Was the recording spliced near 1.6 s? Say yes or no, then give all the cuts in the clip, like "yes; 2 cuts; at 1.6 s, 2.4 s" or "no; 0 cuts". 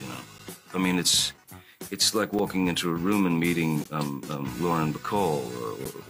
no; 0 cuts